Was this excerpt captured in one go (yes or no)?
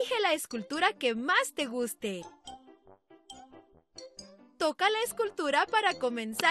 yes